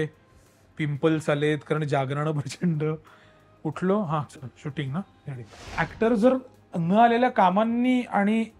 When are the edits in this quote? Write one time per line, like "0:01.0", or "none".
0:05.8